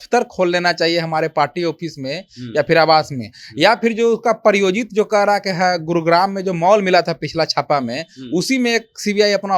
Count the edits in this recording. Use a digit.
0